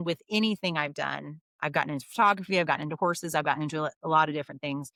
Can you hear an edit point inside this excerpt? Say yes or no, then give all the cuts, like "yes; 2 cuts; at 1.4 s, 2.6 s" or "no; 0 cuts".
no; 0 cuts